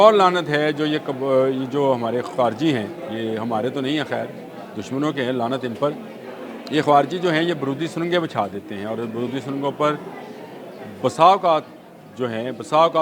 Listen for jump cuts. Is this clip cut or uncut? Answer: uncut